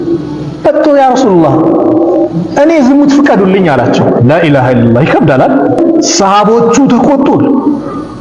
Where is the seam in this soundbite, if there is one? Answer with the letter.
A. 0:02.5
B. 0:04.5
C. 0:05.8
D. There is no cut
C